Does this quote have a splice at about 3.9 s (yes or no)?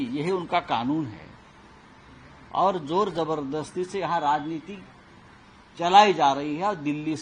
no